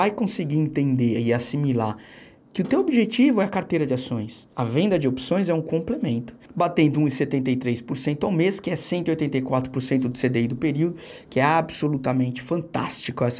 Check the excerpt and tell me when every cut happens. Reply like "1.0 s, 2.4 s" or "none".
6.4 s